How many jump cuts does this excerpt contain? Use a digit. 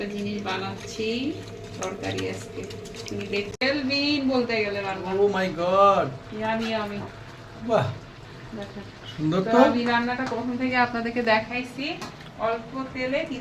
1